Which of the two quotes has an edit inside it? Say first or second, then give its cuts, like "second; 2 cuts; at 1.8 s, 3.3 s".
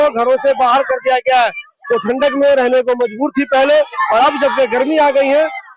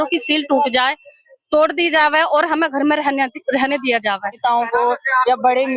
second; 1 cut; at 4.4 s